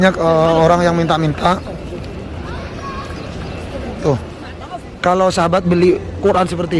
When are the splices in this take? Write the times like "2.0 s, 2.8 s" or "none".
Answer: 4.5 s